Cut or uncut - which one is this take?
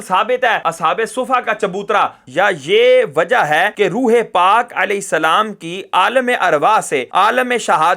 cut